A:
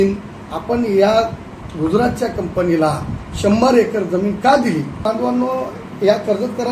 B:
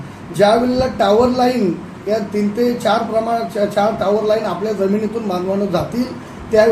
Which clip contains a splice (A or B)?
A